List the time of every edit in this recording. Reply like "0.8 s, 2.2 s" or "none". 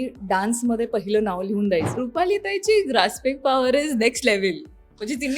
2.0 s